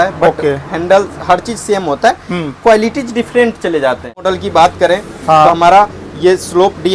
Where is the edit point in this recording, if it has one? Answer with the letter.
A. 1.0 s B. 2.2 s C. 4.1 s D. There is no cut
C